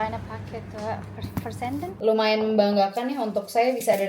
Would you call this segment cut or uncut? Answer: cut